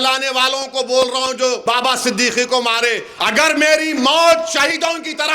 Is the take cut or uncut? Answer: cut